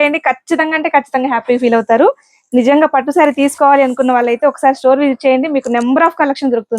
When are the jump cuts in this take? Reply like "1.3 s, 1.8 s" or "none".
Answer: none